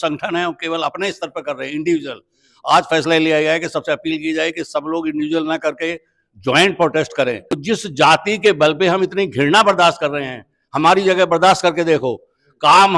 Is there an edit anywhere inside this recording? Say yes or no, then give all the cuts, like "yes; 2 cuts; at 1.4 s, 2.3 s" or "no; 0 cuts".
yes; 1 cut; at 7.5 s